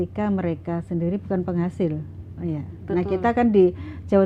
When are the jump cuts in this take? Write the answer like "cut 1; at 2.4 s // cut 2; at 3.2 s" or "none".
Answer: none